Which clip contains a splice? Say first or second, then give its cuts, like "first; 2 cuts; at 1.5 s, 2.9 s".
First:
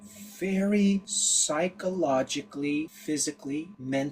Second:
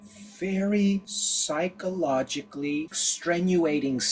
second; 1 cut; at 3.0 s